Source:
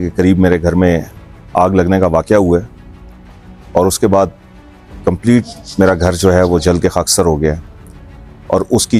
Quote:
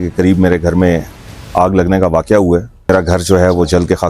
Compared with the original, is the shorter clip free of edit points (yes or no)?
no